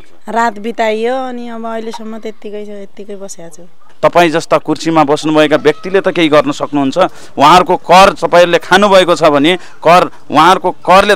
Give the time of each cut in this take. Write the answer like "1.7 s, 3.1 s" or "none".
3.9 s